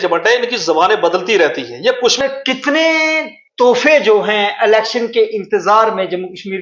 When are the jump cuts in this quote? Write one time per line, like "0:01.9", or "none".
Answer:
0:02.2